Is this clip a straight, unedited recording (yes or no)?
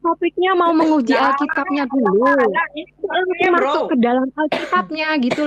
yes